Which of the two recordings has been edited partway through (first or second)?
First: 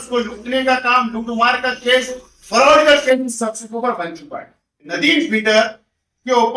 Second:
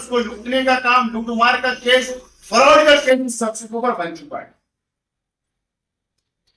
first